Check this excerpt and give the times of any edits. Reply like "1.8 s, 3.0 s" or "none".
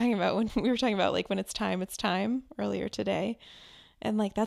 none